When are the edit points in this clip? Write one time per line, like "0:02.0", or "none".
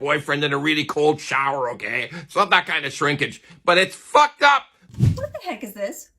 0:04.8